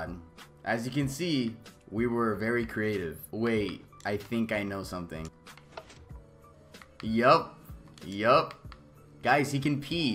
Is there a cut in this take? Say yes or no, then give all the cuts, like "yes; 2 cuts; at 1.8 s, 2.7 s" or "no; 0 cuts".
no; 0 cuts